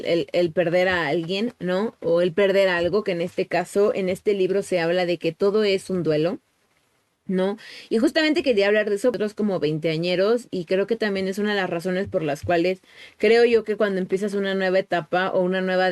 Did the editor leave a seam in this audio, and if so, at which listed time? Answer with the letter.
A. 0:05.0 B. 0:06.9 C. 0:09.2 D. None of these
C